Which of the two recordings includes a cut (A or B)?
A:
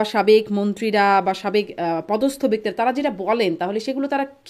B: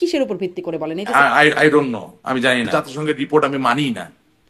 B